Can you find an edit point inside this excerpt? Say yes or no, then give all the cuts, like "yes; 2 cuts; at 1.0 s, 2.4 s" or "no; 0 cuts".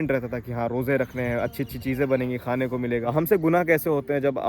yes; 1 cut; at 3.1 s